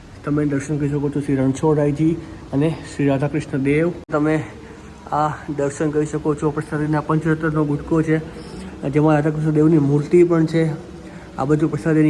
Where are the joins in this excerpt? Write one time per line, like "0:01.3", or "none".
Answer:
0:04.1